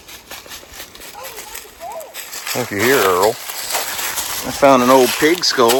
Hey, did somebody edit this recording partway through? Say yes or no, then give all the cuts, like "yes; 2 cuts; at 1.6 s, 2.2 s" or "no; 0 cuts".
no; 0 cuts